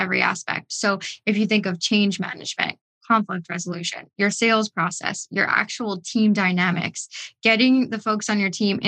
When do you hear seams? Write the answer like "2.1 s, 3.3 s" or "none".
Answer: none